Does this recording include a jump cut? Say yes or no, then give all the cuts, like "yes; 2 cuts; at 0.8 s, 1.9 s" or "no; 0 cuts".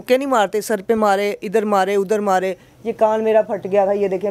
no; 0 cuts